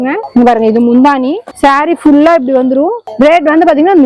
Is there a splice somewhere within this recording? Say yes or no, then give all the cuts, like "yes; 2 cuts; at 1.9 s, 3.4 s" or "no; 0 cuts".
no; 0 cuts